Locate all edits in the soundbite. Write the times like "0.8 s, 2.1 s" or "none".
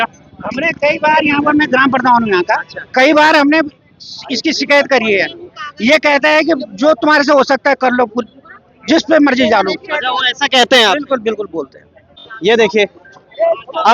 12.2 s